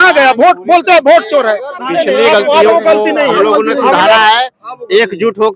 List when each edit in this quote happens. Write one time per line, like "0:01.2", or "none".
0:01.7